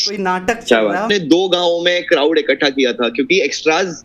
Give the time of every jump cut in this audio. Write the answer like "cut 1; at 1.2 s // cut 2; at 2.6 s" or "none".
cut 1; at 1.1 s